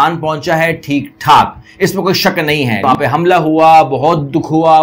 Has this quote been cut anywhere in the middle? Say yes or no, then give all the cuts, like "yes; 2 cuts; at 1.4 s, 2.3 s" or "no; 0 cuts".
yes; 1 cut; at 2.8 s